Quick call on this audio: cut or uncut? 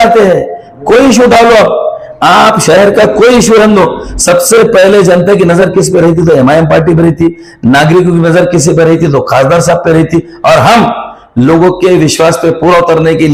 uncut